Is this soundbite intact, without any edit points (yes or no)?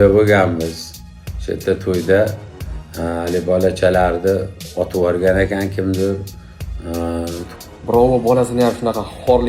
no